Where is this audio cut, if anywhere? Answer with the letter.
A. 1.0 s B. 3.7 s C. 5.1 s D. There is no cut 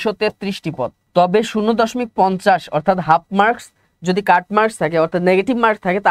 A